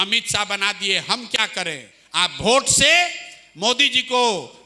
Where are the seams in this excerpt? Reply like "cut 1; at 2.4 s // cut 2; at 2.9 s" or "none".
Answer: cut 1; at 1.9 s